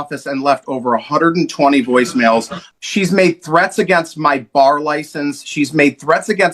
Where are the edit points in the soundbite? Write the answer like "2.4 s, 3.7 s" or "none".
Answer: 2.6 s